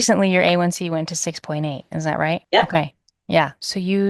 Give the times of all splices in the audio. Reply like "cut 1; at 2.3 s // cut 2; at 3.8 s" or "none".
cut 1; at 2.4 s // cut 2; at 3.1 s